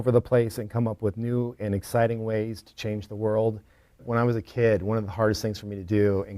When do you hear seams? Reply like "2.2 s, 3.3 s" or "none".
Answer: 4.0 s